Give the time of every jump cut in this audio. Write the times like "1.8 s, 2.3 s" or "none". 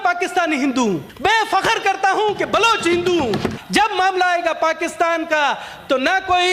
1.1 s, 3.5 s